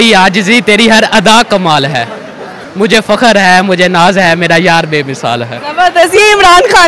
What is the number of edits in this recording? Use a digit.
1